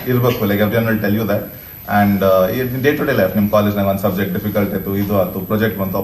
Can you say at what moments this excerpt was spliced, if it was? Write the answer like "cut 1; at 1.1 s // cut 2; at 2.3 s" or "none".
none